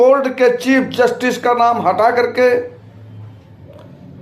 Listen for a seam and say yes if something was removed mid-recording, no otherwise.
no